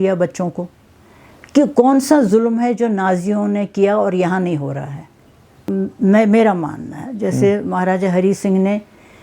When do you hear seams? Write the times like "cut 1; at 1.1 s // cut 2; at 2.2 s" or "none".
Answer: cut 1; at 5.6 s